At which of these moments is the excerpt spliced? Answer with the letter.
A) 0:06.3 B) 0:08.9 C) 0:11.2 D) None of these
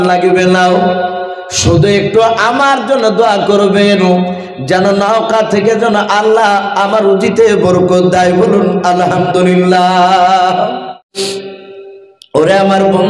C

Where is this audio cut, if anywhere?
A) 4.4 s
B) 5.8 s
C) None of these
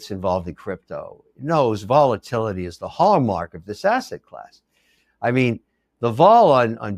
C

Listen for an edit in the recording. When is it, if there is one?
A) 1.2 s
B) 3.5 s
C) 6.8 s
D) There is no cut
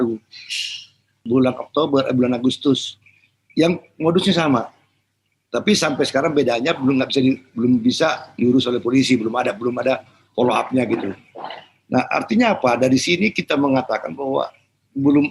A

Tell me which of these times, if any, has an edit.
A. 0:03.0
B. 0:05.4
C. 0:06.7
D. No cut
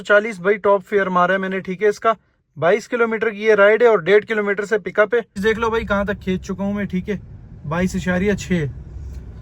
B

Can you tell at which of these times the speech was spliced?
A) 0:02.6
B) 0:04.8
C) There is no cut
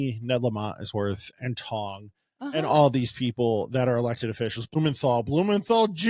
B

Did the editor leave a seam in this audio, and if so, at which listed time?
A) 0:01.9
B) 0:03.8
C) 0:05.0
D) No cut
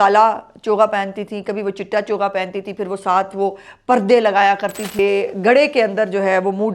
C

